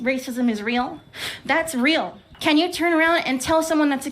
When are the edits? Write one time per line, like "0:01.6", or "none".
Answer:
0:02.2